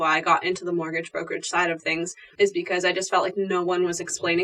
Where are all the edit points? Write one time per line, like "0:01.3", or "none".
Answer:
0:02.2